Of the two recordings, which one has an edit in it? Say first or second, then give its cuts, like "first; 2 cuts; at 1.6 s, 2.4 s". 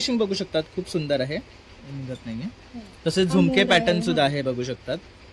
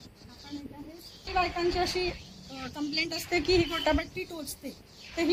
second; 1 cut; at 1.3 s